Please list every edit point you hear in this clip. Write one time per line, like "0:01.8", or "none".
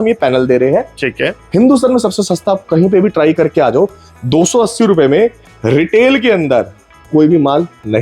none